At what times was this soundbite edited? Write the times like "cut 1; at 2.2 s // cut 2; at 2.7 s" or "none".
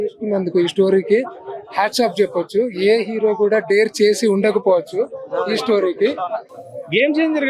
cut 1; at 6.5 s